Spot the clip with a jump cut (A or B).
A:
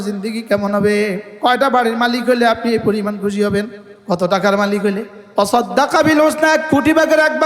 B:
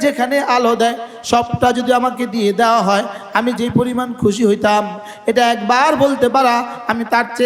A